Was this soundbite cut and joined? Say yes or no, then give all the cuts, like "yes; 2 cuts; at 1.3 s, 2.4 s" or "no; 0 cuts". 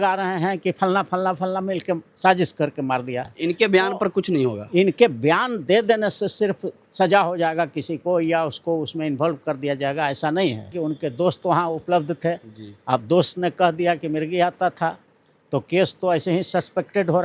yes; 2 cuts; at 3.3 s, 10.7 s